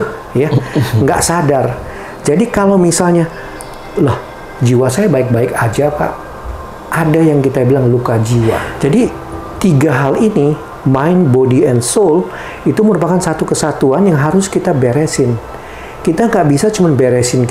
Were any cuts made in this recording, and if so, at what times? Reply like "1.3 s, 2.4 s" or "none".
8.7 s

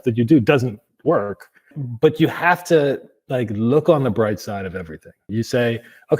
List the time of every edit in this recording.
1.8 s, 5.3 s

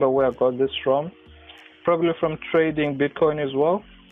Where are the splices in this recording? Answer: none

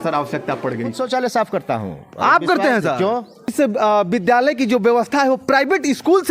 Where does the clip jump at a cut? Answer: 0.9 s, 3.3 s

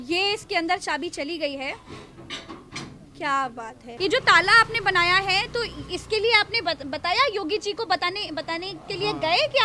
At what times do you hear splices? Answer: 3.9 s

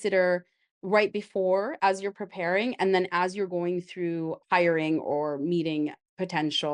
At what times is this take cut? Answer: none

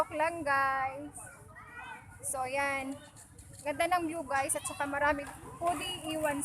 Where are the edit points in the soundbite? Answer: 5.3 s

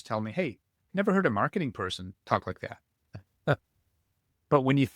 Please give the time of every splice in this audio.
2.1 s

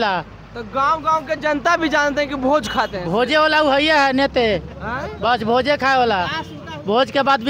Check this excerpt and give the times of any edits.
none

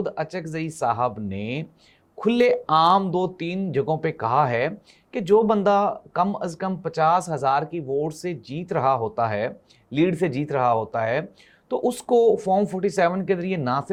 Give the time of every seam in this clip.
none

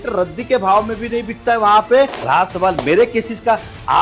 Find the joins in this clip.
2.2 s

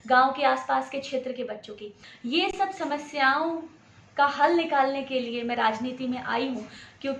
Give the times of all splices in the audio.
2.4 s

